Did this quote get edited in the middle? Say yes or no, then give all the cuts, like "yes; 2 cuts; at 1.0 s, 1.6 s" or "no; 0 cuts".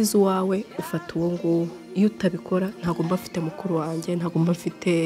yes; 1 cut; at 1.8 s